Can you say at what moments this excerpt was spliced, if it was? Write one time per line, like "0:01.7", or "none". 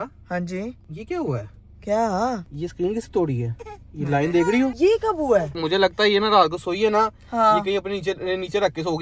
0:00.9
0:02.5
0:04.7
0:05.5